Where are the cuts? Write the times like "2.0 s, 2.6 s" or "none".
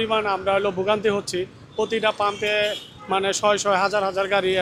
none